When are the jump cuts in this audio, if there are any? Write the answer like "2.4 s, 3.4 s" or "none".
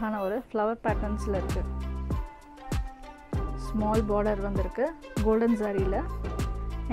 1.4 s, 3.1 s